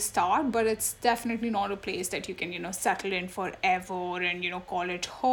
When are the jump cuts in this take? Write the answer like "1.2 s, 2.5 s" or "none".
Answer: none